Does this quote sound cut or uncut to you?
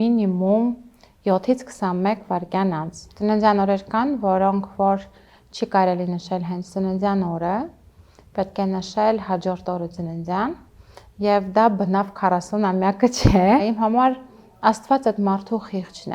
cut